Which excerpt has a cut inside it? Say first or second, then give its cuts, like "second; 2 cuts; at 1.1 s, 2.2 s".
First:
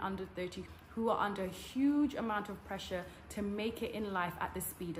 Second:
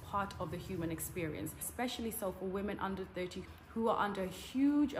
second; 1 cut; at 1.6 s